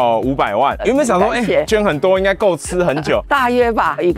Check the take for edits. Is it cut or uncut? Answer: cut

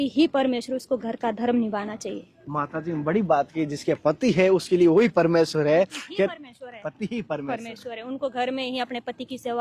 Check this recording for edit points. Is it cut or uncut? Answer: uncut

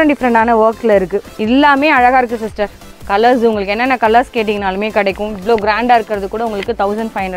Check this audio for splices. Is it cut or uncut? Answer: cut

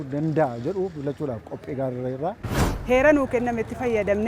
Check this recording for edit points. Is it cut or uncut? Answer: cut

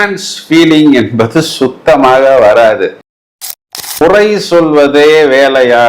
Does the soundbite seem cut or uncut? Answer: cut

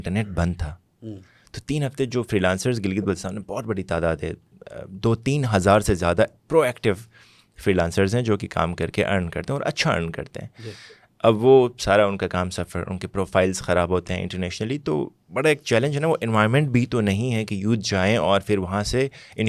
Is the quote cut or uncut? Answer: uncut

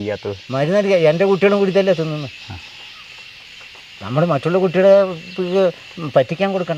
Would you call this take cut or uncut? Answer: uncut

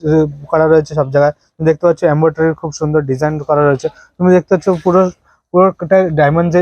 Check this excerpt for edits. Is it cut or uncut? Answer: uncut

